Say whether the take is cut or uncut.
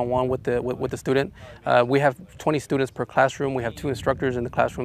uncut